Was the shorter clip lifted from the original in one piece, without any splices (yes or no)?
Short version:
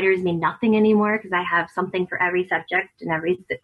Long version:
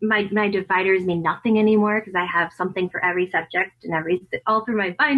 yes